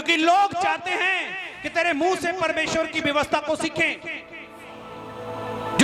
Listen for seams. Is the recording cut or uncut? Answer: uncut